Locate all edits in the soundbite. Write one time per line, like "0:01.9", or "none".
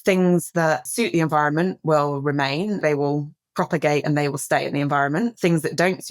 0:00.9
0:02.8